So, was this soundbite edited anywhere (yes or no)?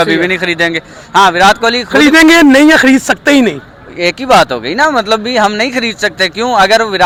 no